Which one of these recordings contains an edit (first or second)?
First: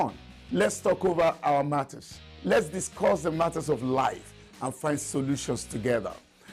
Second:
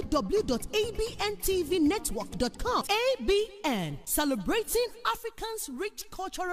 first